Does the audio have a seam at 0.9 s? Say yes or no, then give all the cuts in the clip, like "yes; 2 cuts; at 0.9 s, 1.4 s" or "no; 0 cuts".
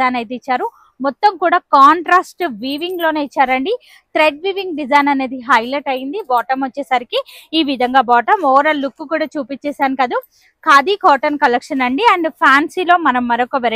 no; 0 cuts